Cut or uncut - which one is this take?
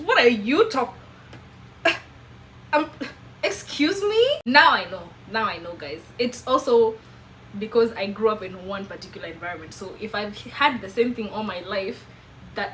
uncut